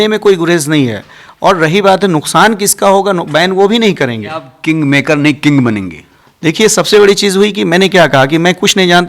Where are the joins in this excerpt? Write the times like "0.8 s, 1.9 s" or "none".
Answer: 4.5 s